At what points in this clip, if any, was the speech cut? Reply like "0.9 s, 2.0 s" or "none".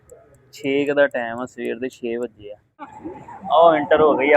3.1 s